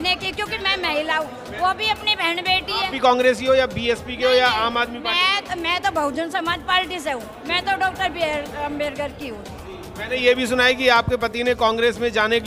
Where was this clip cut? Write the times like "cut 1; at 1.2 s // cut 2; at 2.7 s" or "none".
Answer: none